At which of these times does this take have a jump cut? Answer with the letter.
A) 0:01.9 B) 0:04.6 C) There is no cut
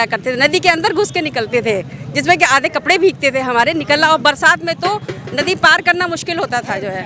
C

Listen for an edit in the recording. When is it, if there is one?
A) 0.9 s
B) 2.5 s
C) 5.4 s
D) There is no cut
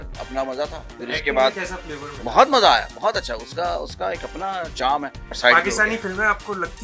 C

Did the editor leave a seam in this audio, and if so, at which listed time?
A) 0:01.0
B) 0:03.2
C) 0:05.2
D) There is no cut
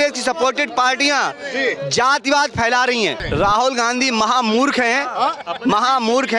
B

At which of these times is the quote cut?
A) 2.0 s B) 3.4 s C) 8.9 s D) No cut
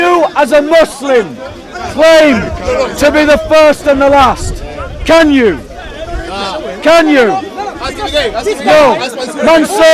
D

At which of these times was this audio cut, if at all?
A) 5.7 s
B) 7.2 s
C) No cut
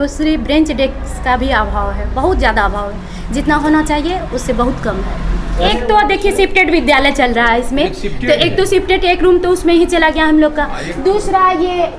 A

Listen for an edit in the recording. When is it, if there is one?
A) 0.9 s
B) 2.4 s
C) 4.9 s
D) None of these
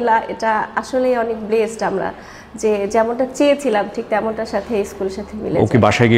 D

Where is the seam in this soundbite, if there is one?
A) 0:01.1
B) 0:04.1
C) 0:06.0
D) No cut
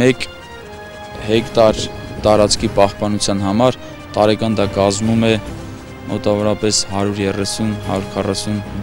D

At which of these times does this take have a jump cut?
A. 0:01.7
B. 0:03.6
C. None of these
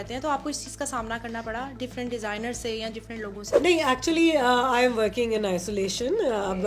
B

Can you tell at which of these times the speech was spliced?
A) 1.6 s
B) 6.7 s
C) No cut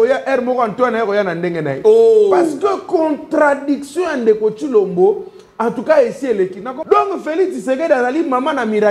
B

